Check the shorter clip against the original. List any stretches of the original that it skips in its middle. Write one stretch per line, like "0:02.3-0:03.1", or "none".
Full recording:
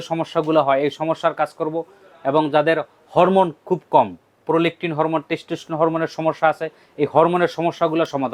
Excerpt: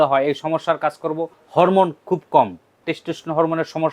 0:01.9-0:03.0
0:04.4-0:05.2